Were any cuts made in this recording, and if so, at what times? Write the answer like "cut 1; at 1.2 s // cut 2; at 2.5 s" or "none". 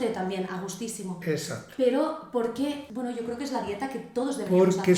none